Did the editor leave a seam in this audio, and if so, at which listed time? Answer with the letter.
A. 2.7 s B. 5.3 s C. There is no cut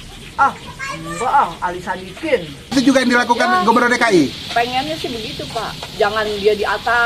A